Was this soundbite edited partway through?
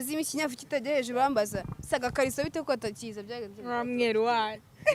no; 0 cuts

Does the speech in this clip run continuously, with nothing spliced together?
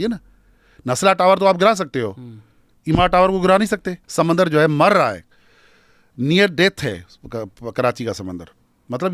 no; 1 cut; at 4.0 s

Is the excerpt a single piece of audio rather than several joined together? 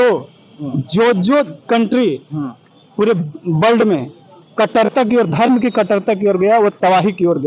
yes; 0 cuts

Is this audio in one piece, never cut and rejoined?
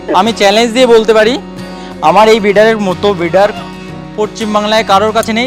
yes; 0 cuts

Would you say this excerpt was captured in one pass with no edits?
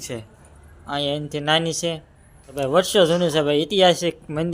no; 1 cut; at 2.6 s

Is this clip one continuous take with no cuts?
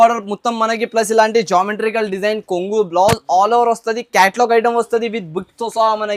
yes; 0 cuts

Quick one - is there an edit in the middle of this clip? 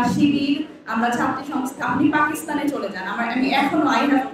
yes; 1 cut; at 1.7 s

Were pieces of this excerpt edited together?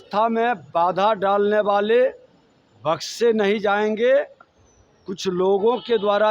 no; 0 cuts

